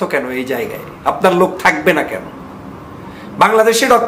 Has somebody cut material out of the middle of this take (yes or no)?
no